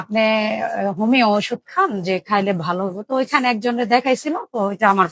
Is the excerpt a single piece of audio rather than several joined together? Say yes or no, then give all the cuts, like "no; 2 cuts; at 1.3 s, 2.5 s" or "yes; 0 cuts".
yes; 0 cuts